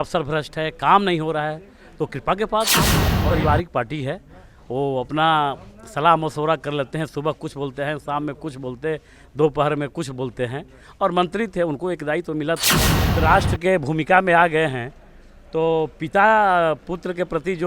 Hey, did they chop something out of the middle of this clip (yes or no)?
yes